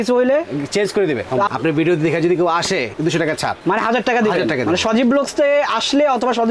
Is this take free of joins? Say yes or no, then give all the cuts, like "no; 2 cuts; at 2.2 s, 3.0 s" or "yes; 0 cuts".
no; 1 cut; at 1.5 s